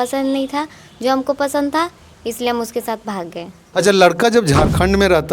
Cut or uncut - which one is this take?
cut